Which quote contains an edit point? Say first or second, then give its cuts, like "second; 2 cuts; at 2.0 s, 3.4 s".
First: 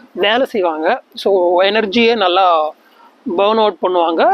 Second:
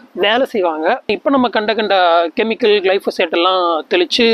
second; 1 cut; at 1.1 s